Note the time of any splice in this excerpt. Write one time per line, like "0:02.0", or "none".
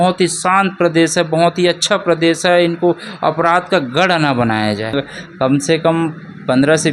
0:04.9